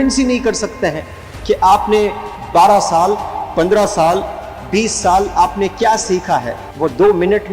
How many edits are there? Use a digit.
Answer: 1